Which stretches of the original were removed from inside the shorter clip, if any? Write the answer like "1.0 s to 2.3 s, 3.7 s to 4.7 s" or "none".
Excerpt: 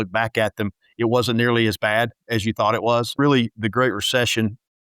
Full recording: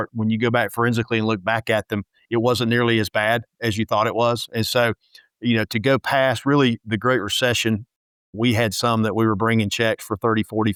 4.4 s to 6.4 s